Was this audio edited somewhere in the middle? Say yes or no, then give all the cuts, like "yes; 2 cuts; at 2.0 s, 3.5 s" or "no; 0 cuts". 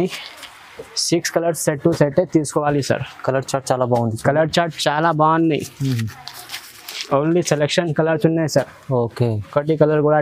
no; 0 cuts